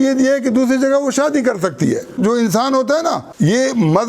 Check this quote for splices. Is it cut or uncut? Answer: cut